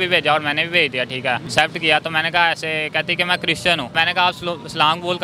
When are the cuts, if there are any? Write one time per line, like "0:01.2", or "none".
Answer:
0:01.5
0:03.9